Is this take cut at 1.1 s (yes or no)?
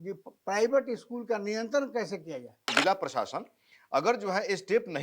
no